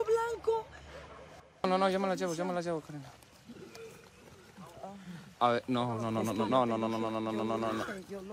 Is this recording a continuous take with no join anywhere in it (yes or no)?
no